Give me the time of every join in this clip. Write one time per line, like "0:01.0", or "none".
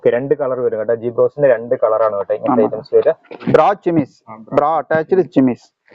0:03.3